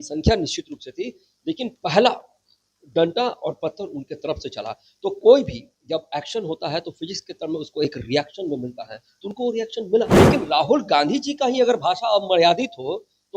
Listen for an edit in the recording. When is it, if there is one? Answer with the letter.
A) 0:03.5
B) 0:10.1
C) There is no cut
B